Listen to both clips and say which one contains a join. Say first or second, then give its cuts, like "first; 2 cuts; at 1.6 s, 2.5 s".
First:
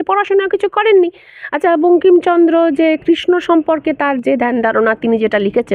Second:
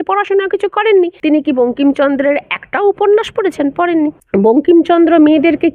second; 2 cuts; at 1.2 s, 4.2 s